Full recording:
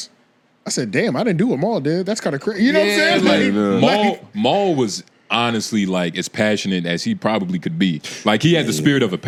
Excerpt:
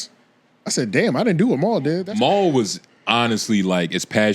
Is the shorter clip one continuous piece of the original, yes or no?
no